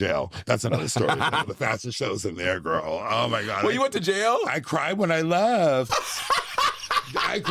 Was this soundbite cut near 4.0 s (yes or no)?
no